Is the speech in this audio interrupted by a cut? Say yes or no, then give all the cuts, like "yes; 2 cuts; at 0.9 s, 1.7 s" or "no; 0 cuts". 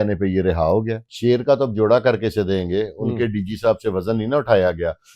yes; 1 cut; at 1.0 s